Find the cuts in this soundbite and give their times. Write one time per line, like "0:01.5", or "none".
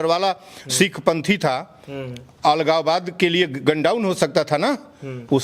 none